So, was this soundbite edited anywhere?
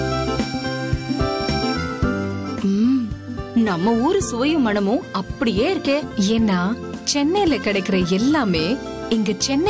no; 0 cuts

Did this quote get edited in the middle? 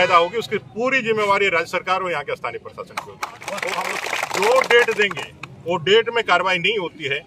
yes; 1 cut; at 4.1 s

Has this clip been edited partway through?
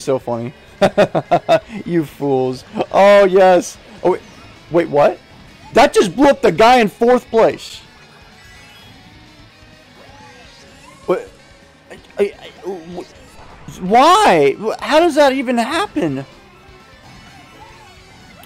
no; 0 cuts

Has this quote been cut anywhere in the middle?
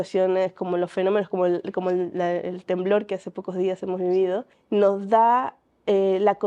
yes; 1 cut; at 4.5 s

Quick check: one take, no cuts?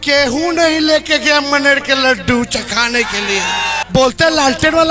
no; 1 cut; at 3.8 s

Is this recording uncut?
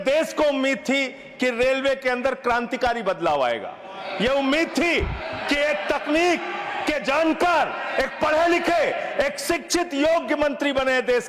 yes; 0 cuts

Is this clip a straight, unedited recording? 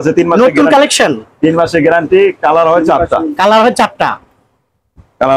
yes; 0 cuts

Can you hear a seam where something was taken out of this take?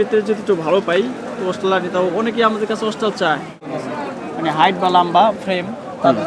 yes; 1 cut; at 3.6 s

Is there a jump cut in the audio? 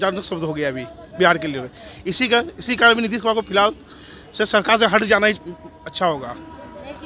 no; 0 cuts

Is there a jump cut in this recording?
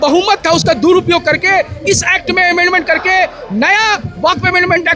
no; 0 cuts

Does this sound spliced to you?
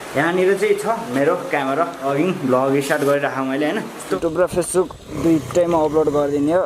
yes; 1 cut; at 4.1 s

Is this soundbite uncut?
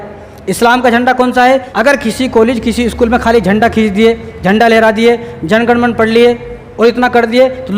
no; 1 cut; at 1.7 s

